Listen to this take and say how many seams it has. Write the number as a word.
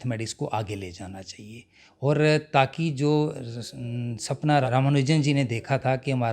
one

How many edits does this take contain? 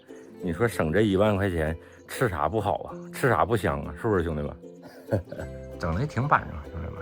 one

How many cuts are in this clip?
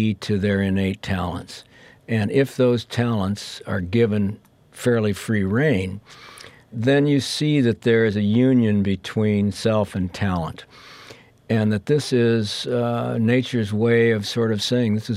one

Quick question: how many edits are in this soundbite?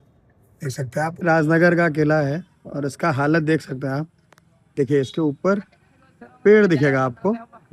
one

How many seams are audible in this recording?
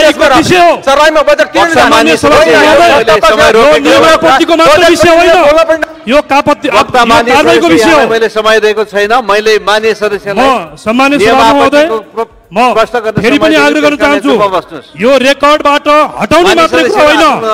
zero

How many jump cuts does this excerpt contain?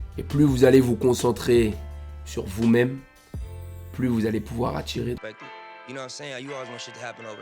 one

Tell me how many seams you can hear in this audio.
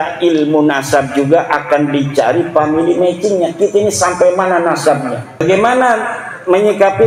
one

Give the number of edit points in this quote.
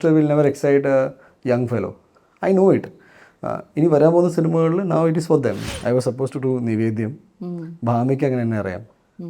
one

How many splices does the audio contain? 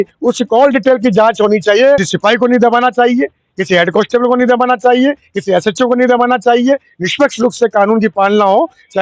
one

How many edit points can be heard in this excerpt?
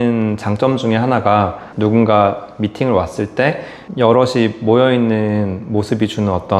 zero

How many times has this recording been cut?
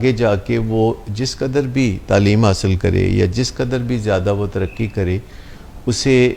zero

